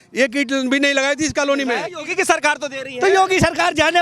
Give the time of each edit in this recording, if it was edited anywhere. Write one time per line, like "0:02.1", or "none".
0:01.9